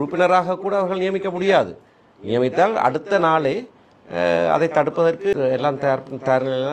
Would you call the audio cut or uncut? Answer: cut